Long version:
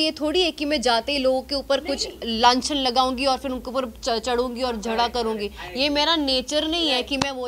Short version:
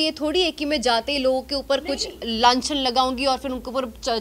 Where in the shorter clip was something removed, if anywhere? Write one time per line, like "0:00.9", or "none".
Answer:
none